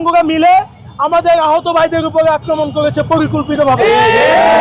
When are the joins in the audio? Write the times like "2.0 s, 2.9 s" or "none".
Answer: none